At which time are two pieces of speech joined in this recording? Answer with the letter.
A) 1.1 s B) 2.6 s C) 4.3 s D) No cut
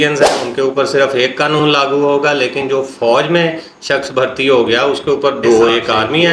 D